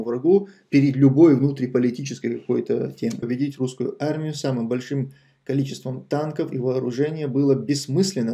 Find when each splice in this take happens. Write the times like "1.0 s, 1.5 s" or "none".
3.3 s